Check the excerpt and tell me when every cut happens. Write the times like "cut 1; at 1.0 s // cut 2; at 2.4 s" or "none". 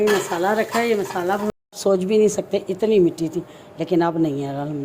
cut 1; at 1.5 s